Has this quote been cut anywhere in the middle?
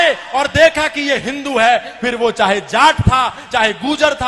no; 0 cuts

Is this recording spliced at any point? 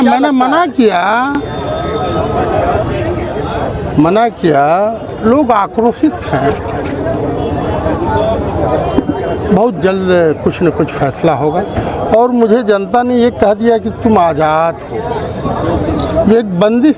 no; 0 cuts

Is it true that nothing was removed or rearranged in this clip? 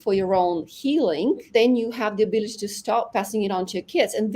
no; 2 cuts; at 1.5 s, 3.1 s

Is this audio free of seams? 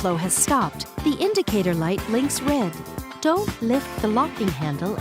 yes; 0 cuts

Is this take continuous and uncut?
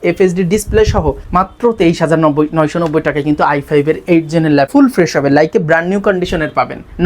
no; 2 cuts; at 1.2 s, 4.7 s

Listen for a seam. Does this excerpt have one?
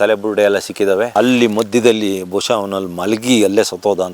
yes; 1 cut; at 1.1 s

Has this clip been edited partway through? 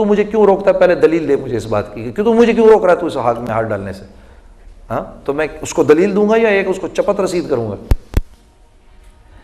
no; 0 cuts

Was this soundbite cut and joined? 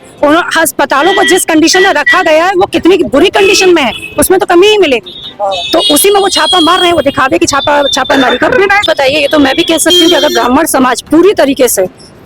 yes; 1 cut; at 8.8 s

